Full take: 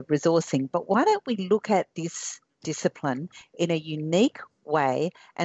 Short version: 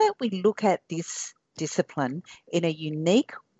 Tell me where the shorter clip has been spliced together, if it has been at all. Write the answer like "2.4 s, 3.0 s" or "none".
none